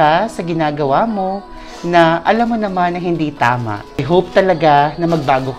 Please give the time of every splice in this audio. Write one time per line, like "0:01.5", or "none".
0:04.0